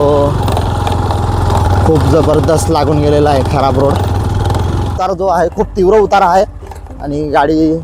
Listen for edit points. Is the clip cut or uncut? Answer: cut